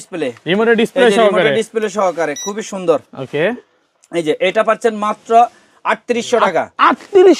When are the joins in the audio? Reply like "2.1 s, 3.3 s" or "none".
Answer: none